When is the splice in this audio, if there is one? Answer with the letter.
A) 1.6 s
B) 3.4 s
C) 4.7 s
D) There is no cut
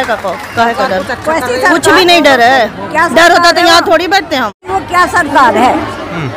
C